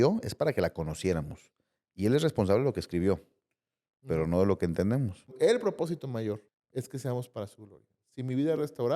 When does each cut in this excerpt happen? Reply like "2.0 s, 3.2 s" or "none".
5.3 s, 6.5 s